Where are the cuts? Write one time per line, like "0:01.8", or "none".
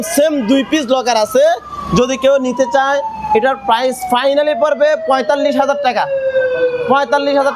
none

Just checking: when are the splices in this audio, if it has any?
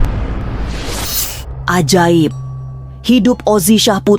none

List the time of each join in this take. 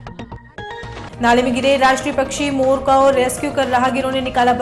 none

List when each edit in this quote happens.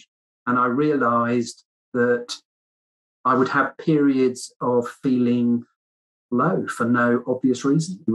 none

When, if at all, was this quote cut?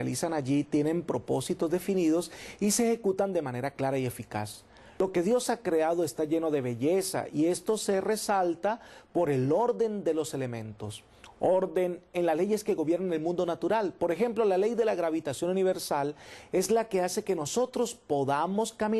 0:11.7

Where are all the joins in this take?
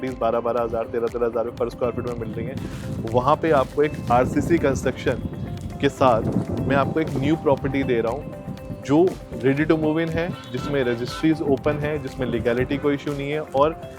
none

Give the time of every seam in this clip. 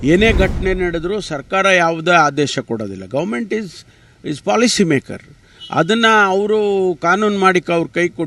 none

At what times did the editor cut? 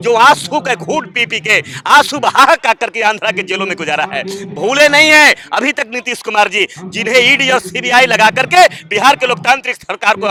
none

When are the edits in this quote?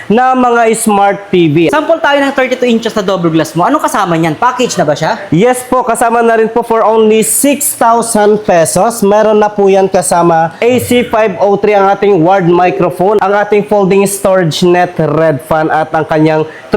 0:01.7
0:10.5
0:13.2

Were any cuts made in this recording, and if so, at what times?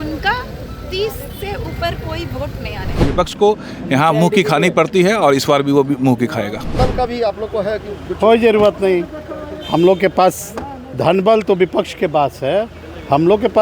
0:03.0
0:06.8

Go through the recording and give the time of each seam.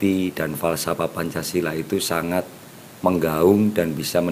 none

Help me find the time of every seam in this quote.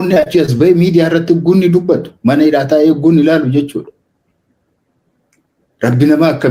none

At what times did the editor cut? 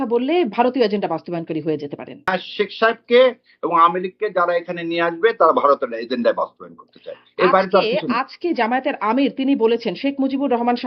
0:02.3

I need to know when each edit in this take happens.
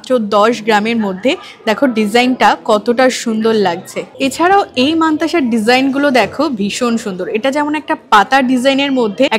none

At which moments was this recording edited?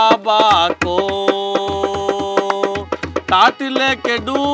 none

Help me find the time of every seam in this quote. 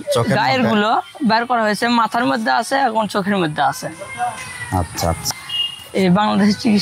0:05.4

